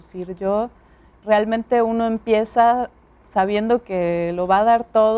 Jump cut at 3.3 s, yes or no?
no